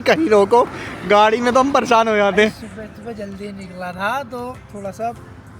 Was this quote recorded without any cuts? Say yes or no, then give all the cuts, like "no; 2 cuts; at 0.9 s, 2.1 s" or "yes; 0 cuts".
yes; 0 cuts